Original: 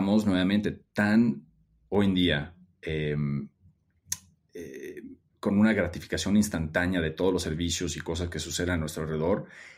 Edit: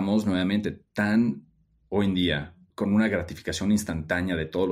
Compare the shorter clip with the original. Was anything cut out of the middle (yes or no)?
yes